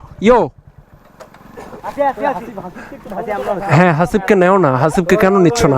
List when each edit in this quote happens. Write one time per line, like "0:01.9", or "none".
none